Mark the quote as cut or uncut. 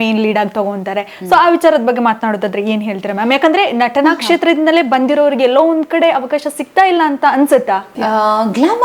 cut